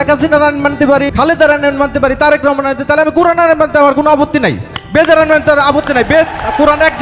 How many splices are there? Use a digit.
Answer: 1